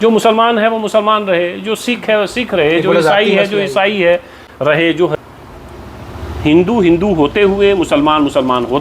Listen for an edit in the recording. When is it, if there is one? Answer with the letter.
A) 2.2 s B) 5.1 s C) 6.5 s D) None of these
B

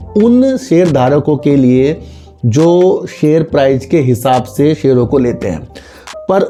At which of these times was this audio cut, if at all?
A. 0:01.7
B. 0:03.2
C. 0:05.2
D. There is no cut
D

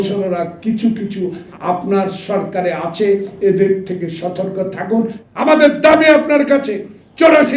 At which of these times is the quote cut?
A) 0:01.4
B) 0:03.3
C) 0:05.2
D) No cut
C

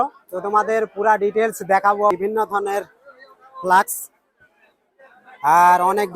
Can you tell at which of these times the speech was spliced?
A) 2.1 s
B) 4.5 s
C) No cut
A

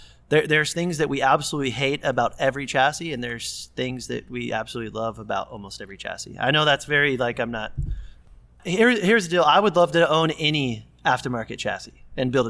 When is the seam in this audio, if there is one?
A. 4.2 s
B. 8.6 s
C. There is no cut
B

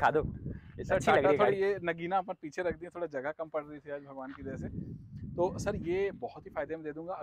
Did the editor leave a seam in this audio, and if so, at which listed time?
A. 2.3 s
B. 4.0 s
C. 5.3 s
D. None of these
D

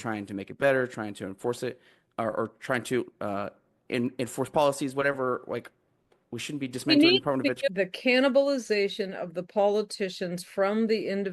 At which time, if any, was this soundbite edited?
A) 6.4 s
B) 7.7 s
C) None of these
B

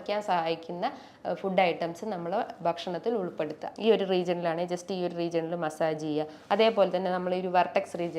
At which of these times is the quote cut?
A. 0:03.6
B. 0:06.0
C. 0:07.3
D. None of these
A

